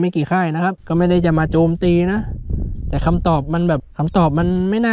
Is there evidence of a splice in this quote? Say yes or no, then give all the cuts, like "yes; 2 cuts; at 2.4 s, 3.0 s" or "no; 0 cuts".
yes; 1 cut; at 3.9 s